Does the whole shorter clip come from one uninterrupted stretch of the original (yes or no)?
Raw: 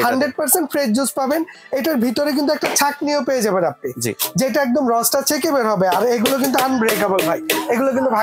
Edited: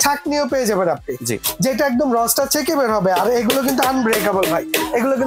yes